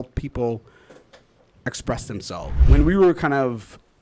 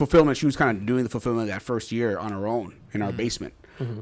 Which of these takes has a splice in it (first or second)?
first